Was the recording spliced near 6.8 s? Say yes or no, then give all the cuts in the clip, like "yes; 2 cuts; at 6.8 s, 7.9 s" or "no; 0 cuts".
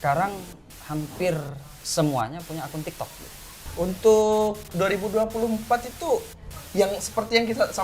no; 1 cut; at 3.6 s